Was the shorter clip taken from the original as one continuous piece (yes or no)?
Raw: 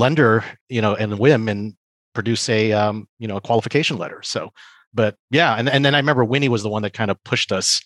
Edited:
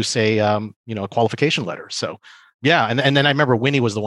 no